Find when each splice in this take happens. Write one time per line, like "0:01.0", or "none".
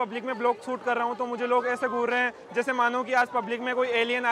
none